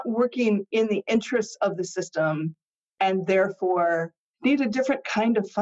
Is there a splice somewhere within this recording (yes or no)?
yes